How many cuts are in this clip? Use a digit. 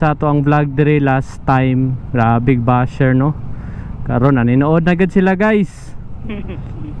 0